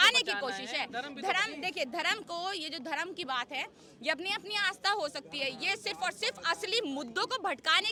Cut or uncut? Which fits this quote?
uncut